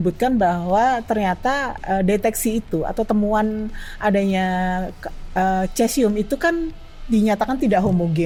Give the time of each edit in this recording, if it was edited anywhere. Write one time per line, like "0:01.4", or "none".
none